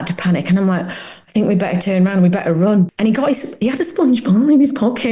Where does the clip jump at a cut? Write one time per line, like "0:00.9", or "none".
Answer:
0:02.9